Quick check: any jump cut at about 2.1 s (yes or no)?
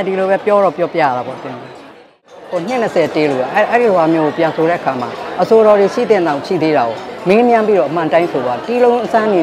yes